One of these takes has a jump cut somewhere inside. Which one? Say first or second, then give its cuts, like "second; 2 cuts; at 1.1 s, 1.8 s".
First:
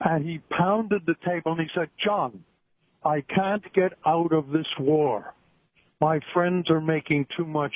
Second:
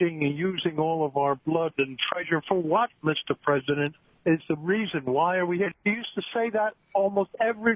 second; 2 cuts; at 3.9 s, 5.7 s